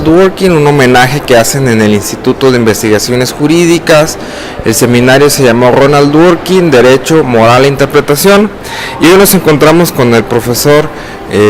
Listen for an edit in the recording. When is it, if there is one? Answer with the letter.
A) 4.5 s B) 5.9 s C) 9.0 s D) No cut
C